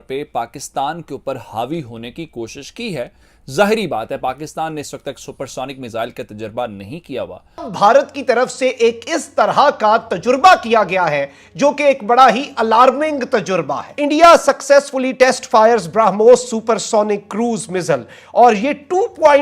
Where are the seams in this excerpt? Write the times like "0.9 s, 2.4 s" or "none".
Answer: 7.7 s, 13.9 s